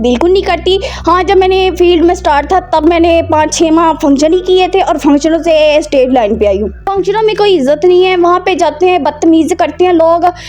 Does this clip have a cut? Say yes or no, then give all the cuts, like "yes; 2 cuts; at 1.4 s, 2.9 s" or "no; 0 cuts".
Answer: yes; 1 cut; at 6.8 s